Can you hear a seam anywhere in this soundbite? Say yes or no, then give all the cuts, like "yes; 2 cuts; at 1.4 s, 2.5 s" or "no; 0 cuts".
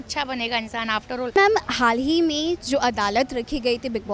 yes; 1 cut; at 1.4 s